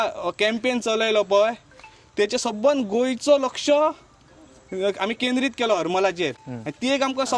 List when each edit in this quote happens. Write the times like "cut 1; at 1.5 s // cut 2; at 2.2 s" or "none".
none